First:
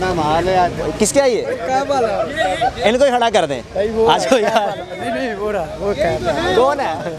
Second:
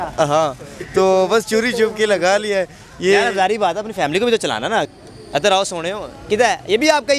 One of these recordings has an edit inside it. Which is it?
second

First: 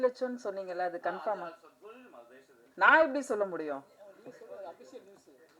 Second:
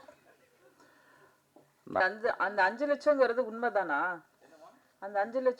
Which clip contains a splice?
second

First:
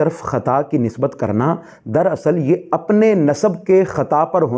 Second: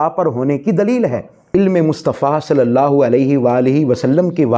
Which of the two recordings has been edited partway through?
second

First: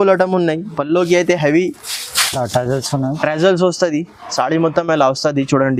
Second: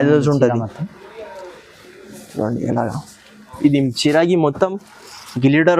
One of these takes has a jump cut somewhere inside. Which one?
second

